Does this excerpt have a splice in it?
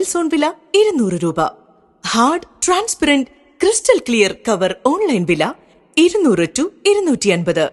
no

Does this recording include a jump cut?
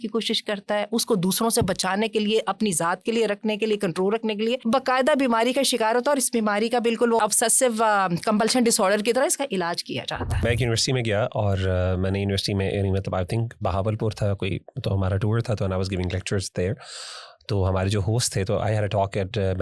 yes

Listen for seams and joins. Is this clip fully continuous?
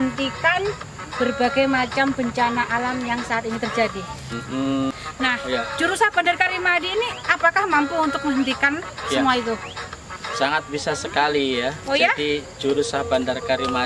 no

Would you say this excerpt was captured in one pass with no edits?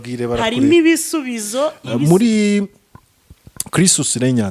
no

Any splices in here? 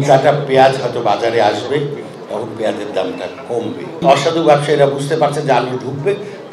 yes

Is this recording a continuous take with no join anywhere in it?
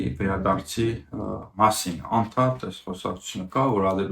yes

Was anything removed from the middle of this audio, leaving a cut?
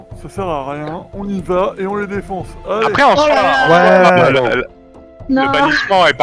no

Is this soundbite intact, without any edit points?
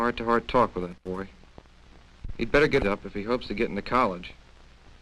no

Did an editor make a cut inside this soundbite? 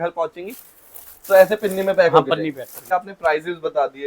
yes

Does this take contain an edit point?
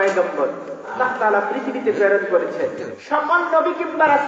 yes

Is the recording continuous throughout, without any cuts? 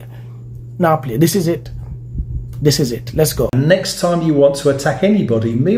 no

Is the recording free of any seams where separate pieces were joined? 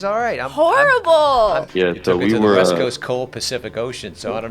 no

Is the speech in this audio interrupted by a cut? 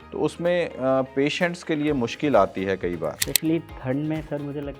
yes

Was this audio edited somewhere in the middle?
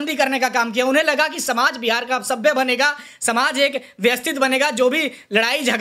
no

